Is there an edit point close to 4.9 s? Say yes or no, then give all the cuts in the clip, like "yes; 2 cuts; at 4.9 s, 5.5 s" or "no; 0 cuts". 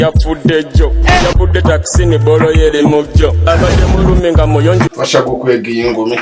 yes; 1 cut; at 4.9 s